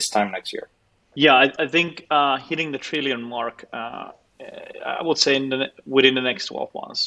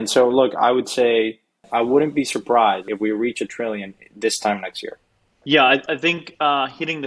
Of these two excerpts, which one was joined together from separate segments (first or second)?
second